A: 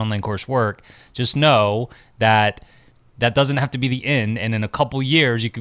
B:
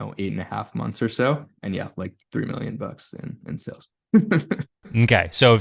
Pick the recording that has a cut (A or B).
B